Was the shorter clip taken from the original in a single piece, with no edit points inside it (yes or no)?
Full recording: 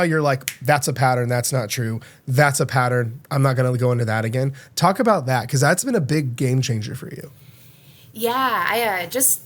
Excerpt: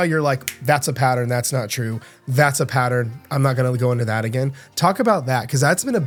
yes